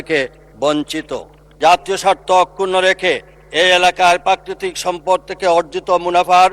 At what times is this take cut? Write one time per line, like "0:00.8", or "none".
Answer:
0:01.5